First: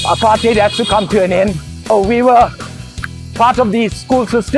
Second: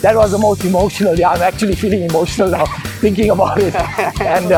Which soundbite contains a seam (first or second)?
first